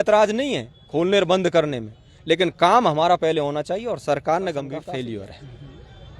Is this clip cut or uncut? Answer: cut